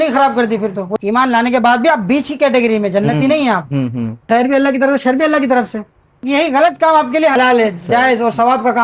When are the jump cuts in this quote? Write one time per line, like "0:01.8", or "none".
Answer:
0:00.9
0:04.1
0:06.2
0:07.4